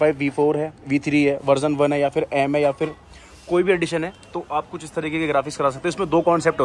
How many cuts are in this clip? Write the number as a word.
zero